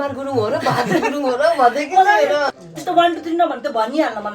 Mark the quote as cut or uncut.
cut